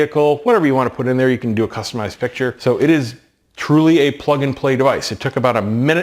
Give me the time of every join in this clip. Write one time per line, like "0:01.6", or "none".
0:02.6